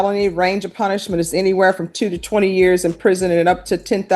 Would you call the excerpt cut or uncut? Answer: uncut